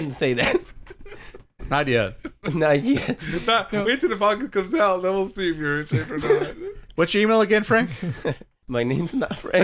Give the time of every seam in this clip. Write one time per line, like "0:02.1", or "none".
0:08.5

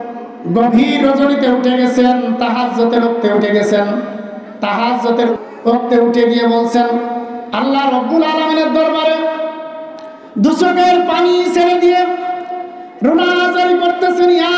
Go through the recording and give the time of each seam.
0:05.3

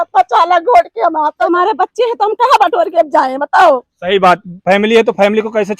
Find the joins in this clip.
0:01.4

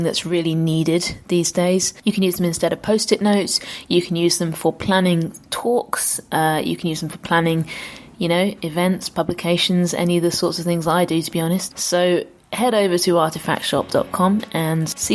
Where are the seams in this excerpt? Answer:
none

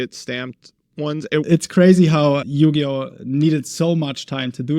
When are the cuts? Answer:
0:01.5

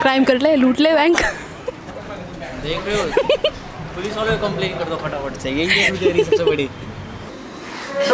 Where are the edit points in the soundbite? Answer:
none

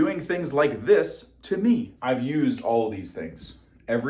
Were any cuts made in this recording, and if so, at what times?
0:01.9

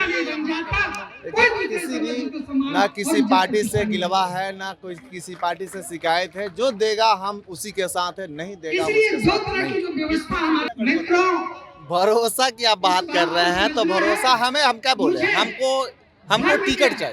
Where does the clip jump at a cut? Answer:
0:10.7

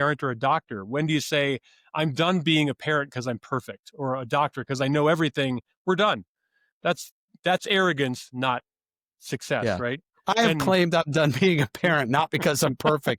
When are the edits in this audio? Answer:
none

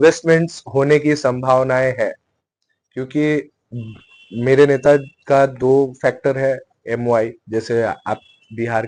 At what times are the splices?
none

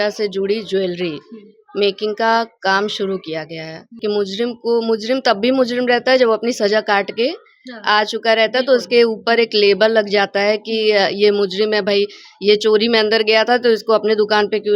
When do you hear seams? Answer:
0:04.0

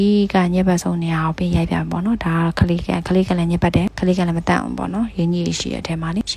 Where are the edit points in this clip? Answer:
none

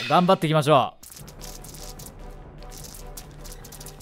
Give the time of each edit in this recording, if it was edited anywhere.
none

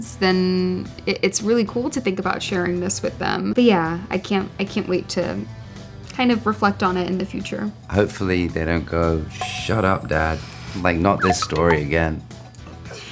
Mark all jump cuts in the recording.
0:03.5
0:07.8

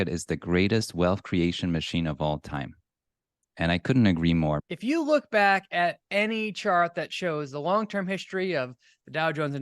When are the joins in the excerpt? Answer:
0:04.7

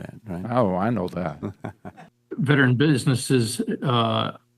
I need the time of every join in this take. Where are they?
0:01.9

